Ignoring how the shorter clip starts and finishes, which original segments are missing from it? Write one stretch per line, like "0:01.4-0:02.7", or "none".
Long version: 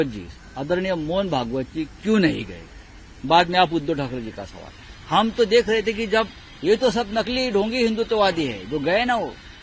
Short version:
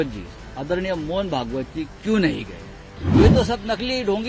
0:03.2-0:06.7

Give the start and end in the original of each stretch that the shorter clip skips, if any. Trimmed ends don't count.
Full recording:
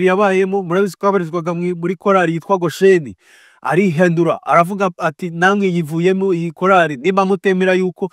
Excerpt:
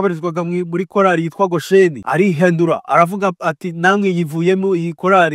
0:03.1-0:03.6

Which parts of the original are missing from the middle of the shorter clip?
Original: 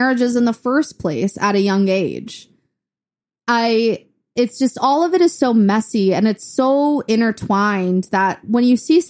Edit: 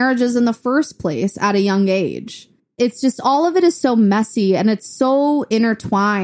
0:02.6-0:04.2

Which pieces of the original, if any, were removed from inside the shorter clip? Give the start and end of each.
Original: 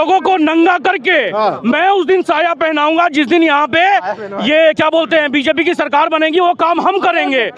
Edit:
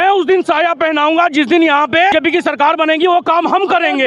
0:03.9-0:05.4

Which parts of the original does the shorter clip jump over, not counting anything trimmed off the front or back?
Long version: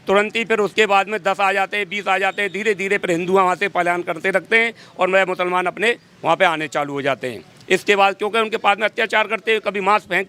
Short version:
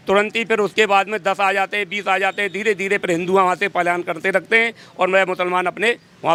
none

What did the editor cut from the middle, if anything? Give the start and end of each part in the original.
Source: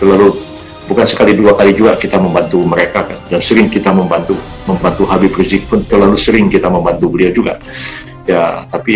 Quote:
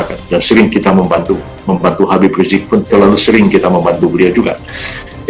none

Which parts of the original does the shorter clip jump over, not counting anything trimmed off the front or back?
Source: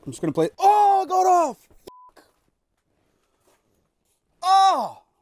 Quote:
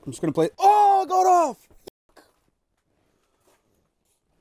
none

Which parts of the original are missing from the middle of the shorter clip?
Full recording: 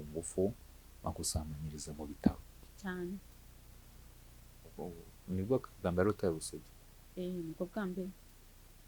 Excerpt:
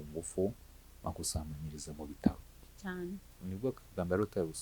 0:03.3-0:05.2

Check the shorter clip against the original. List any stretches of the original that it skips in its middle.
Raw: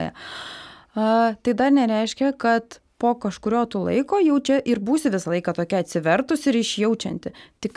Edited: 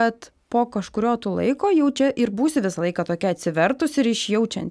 none

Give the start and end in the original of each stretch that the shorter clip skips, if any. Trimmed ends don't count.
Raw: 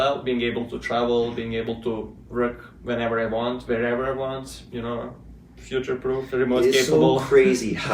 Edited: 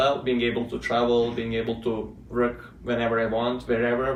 none

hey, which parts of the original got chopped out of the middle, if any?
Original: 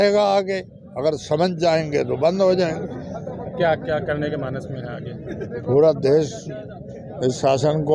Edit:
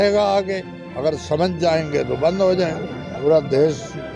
0:03.2-0:05.7

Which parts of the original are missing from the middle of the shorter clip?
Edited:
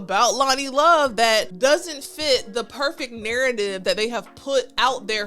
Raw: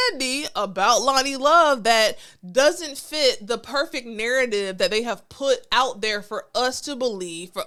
0:02.2-0:02.4

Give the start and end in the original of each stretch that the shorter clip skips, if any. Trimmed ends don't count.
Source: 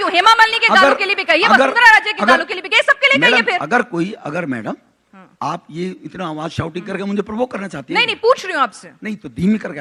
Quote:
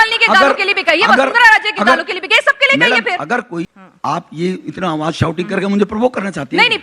0:04.2-0:05.1

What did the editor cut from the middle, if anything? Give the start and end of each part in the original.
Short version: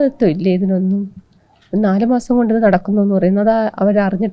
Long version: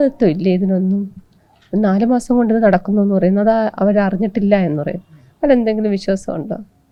none

